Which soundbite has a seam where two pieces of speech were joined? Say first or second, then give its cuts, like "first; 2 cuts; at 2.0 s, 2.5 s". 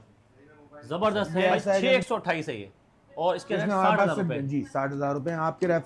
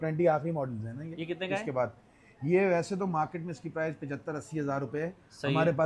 first; 1 cut; at 1.8 s